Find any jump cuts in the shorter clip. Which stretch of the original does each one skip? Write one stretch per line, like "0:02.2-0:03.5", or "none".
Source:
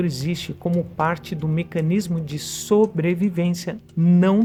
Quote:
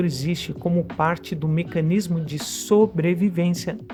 none